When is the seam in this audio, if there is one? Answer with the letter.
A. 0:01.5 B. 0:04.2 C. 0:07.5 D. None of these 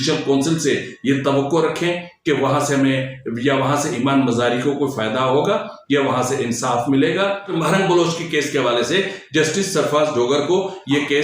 C